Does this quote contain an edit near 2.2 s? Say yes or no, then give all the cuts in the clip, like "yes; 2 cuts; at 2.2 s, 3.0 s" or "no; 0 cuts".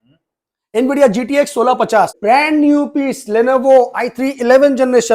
yes; 1 cut; at 2.2 s